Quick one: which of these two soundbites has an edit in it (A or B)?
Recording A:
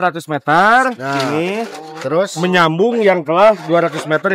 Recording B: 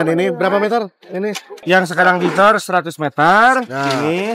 B